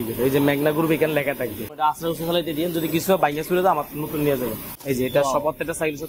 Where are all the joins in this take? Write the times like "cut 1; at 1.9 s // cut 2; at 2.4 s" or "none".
cut 1; at 1.7 s // cut 2; at 4.7 s